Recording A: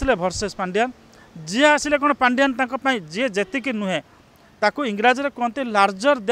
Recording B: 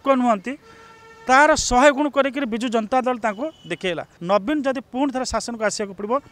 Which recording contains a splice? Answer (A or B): B